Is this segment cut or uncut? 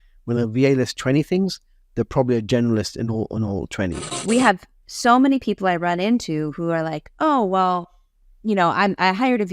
cut